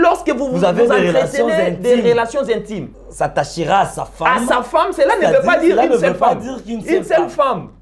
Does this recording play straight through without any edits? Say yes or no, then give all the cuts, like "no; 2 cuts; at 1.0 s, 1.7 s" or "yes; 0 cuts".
no; 1 cut; at 2.8 s